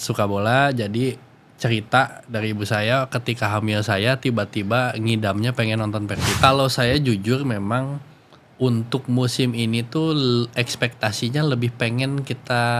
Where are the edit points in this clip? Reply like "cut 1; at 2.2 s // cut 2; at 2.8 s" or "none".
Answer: cut 1; at 6.4 s